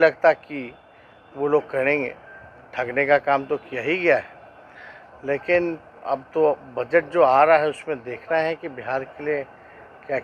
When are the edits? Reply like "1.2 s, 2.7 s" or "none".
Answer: none